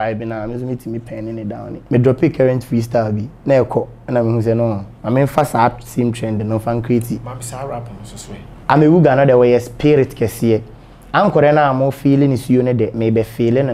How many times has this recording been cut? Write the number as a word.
two